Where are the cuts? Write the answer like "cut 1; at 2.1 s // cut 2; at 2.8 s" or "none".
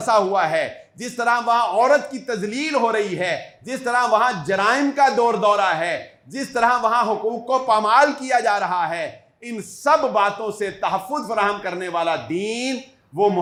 none